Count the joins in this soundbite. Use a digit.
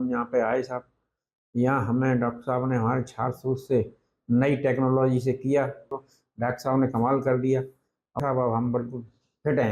2